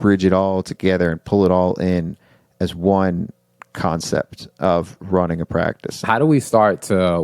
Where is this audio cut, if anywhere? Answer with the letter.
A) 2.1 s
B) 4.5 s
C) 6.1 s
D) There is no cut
C